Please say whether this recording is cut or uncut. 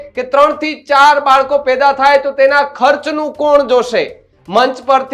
uncut